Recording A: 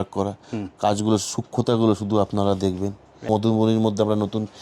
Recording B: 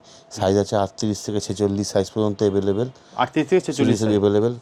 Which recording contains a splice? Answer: A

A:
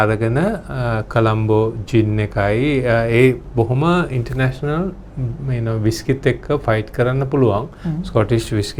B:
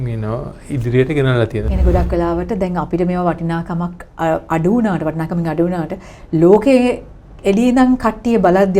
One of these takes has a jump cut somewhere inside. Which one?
B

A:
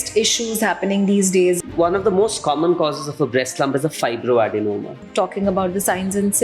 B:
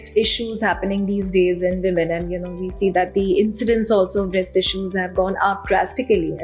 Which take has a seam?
A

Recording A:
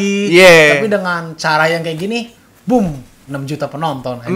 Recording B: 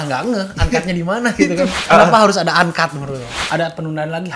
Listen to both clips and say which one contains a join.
B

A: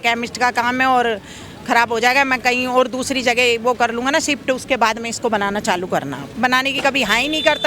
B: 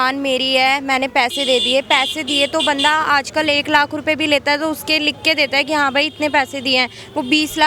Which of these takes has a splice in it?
A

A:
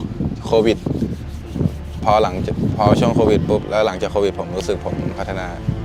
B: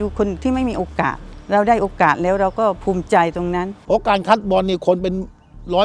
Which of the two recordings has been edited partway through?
B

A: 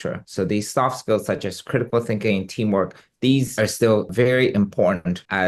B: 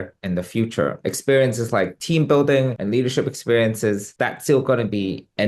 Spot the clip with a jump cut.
B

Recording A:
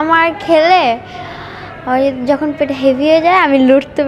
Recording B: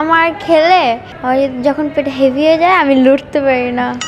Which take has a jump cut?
B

